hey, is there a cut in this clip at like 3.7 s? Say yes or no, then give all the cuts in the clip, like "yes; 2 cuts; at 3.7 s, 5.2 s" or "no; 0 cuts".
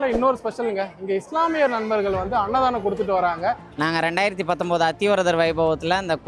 yes; 1 cut; at 3.7 s